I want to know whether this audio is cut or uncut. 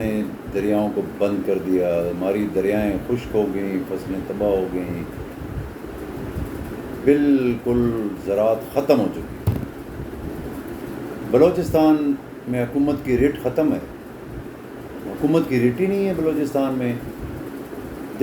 uncut